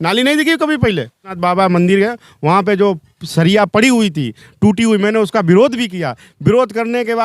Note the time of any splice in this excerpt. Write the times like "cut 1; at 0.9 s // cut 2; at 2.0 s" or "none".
cut 1; at 1.3 s